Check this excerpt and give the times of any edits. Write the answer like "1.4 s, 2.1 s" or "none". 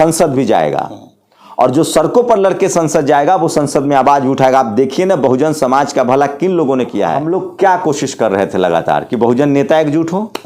7.2 s